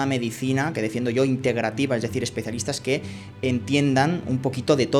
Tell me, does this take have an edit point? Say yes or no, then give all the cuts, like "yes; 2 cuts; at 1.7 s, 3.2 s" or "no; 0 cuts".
no; 0 cuts